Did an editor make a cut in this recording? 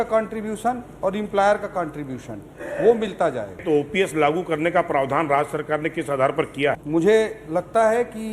yes; 2 cuts; at 3.6 s, 6.8 s

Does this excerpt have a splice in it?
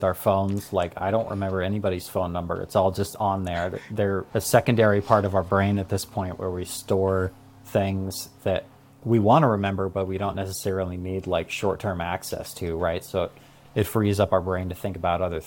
no; 0 cuts

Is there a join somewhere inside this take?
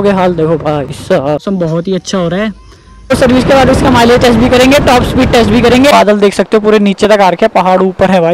yes; 3 cuts; at 1.4 s, 3.1 s, 5.9 s

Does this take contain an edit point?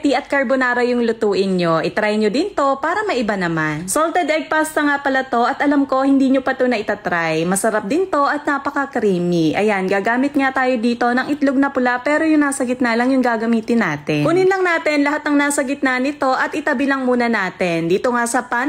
no; 0 cuts

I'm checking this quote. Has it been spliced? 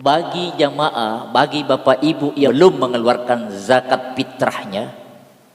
yes; 1 cut; at 2.5 s

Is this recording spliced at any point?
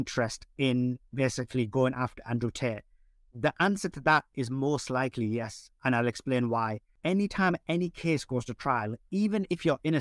yes; 1 cut; at 6.9 s

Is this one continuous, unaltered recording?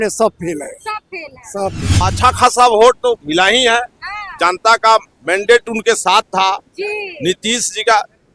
no; 1 cut; at 1.9 s

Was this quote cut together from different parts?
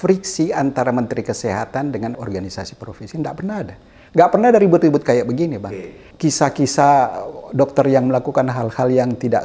yes; 2 cuts; at 2.2 s, 6.0 s

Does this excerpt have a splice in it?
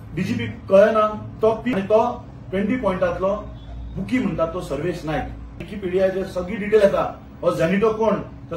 yes; 2 cuts; at 1.7 s, 5.7 s

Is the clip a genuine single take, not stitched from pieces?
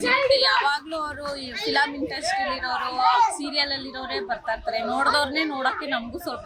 yes; 0 cuts

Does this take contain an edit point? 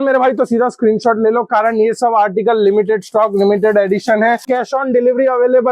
yes; 1 cut; at 4.5 s

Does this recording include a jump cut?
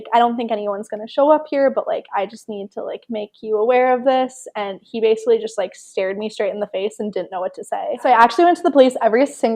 yes; 1 cut; at 8.0 s

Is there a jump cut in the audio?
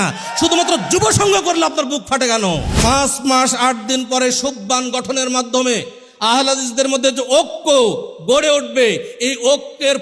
yes; 1 cut; at 2.7 s

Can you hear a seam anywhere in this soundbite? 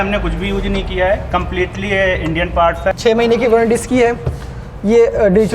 yes; 1 cut; at 2.9 s

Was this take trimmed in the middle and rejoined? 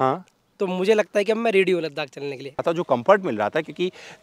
yes; 1 cut; at 2.6 s

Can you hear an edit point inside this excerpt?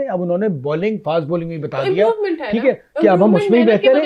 no; 0 cuts

